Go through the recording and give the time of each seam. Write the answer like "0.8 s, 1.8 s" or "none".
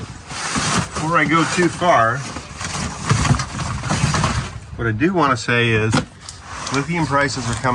none